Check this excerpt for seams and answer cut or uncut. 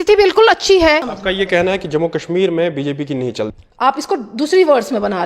cut